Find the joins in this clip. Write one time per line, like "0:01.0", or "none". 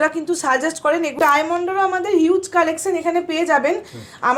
0:01.1